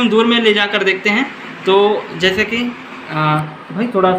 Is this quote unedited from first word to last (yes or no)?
yes